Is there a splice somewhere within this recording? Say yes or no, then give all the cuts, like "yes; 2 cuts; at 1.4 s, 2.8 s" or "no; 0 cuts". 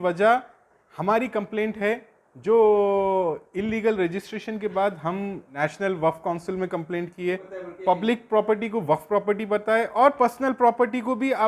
yes; 2 cuts; at 5.5 s, 7.5 s